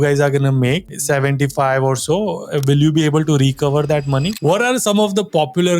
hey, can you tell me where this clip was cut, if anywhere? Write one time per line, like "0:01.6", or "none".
0:00.9
0:04.3

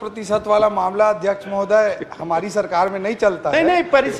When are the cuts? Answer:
none

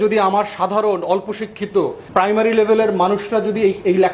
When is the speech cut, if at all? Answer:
0:02.0

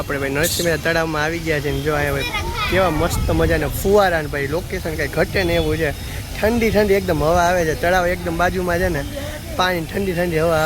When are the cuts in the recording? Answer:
none

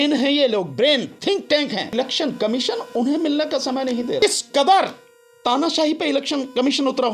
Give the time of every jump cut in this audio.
0:01.9
0:04.2

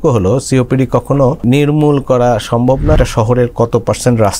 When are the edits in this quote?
0:01.4
0:03.0

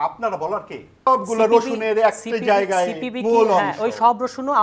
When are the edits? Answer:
0:01.1

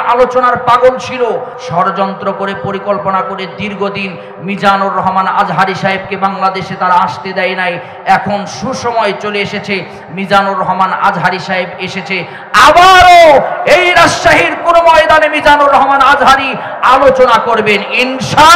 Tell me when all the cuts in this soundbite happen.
0:01.6

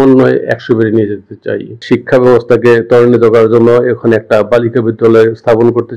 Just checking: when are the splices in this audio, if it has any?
0:01.8

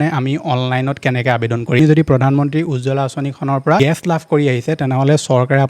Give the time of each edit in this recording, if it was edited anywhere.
0:01.8
0:03.8

